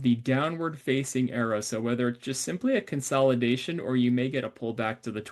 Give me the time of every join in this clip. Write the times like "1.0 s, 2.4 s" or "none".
none